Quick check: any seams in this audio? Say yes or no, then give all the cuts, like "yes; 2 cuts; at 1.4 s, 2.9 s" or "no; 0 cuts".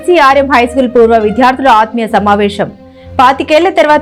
no; 0 cuts